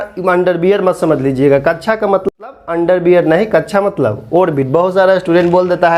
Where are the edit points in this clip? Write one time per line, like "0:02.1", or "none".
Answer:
0:02.3